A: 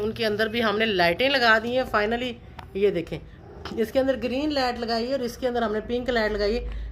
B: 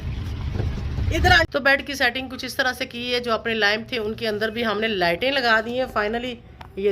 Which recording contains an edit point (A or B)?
B